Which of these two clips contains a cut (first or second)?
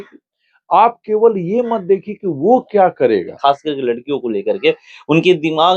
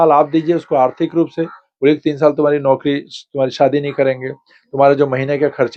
first